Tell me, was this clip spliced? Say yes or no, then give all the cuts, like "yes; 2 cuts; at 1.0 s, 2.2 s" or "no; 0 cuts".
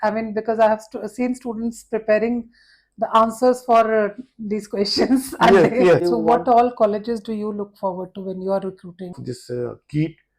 yes; 2 cuts; at 6.0 s, 9.2 s